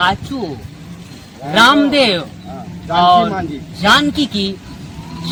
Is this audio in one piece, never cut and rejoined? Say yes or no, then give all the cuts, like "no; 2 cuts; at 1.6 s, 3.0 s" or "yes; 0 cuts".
yes; 0 cuts